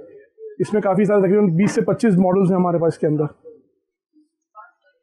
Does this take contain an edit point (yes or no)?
no